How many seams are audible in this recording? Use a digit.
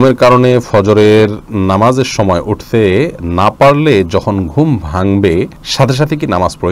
1